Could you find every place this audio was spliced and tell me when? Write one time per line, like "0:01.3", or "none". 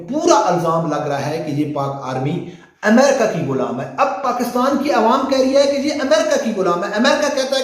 none